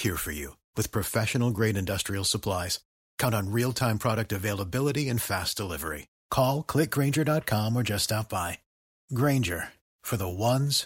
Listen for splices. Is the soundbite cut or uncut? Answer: uncut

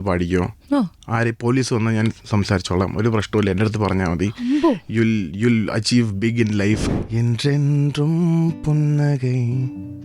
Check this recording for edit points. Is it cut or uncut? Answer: cut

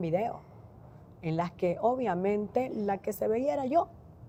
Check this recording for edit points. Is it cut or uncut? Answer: uncut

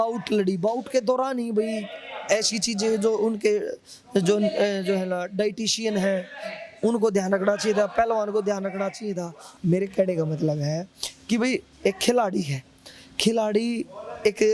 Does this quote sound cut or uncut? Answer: cut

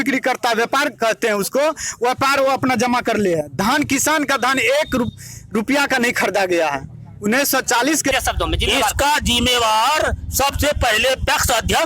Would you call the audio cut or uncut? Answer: cut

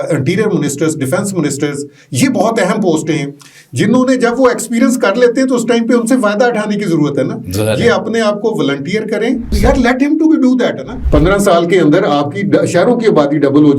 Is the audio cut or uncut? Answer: cut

